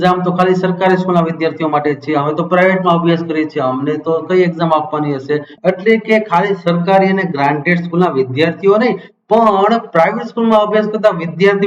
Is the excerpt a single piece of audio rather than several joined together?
no; 1 cut; at 5.5 s

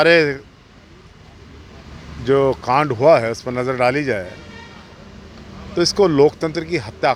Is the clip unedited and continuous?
yes; 0 cuts

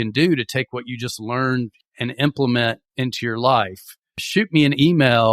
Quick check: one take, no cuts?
no; 1 cut; at 1.8 s

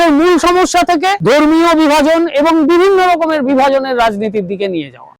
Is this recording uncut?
no; 1 cut; at 1.2 s

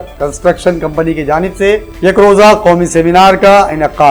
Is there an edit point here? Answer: no; 0 cuts

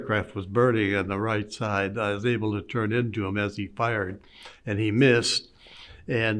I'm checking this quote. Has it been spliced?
no; 0 cuts

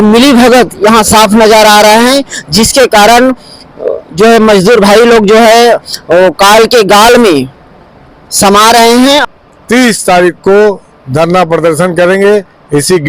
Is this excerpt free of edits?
no; 1 cut; at 9.2 s

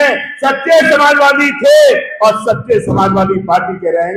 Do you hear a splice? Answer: no; 0 cuts

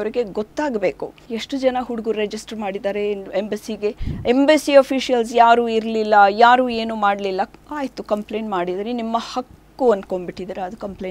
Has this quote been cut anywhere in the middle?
yes; 2 cuts; at 1.1 s, 4.1 s

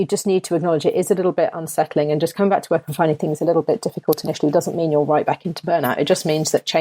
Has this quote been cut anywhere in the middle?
no; 0 cuts

